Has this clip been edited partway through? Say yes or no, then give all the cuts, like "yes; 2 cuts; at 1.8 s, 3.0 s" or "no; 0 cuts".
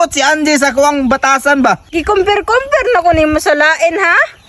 yes; 1 cut; at 1.9 s